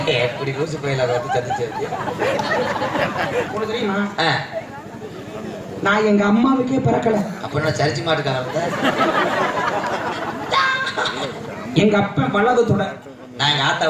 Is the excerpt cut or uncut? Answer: cut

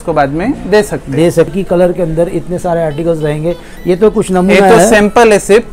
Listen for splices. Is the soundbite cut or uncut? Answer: cut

